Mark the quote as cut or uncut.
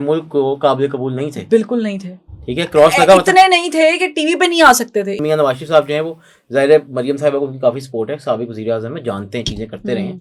cut